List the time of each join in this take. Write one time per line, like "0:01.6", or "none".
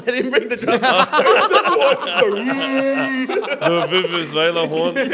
none